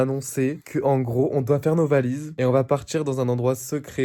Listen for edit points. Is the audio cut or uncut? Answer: uncut